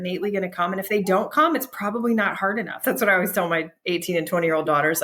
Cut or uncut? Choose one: cut